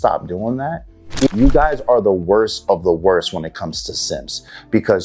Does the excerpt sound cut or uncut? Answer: cut